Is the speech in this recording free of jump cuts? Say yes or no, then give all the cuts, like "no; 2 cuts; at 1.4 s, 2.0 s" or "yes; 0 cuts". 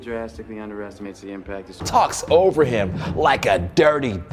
no; 1 cut; at 1.8 s